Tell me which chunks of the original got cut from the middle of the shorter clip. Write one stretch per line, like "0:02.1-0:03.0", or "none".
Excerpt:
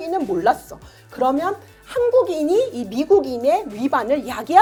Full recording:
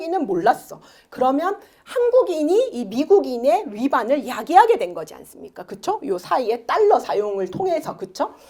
none